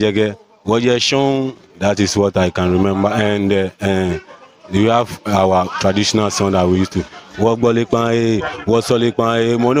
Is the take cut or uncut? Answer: uncut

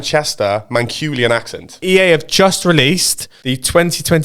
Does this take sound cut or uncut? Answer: cut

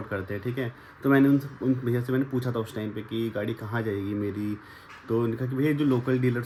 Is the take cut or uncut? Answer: uncut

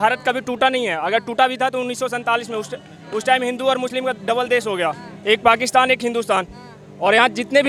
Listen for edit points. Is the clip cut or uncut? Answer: uncut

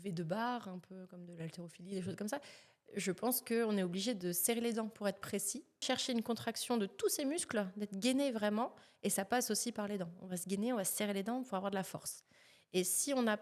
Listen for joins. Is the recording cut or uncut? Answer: cut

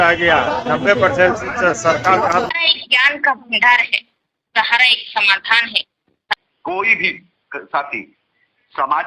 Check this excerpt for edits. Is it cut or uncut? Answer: cut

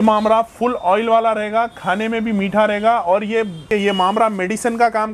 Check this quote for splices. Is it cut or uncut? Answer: cut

